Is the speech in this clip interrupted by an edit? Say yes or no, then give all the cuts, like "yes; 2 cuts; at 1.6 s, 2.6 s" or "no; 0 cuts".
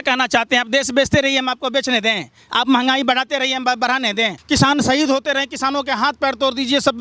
no; 0 cuts